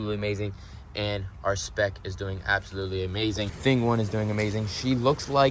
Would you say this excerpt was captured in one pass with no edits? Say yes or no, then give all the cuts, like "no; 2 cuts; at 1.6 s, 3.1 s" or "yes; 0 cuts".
no; 1 cut; at 3.5 s